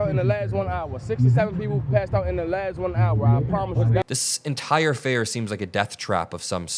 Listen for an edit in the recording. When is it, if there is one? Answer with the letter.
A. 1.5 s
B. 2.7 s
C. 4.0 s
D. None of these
C